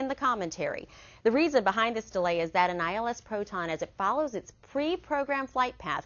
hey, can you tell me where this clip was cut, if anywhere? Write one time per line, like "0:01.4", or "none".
0:03.8